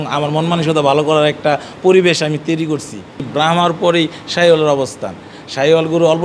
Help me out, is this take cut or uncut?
cut